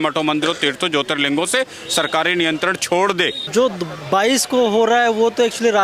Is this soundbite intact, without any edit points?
no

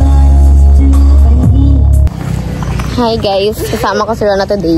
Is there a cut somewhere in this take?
yes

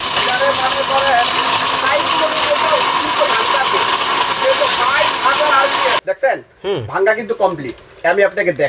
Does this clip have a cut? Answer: yes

